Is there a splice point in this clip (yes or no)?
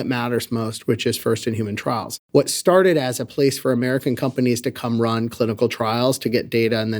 yes